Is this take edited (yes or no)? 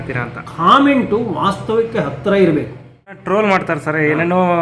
yes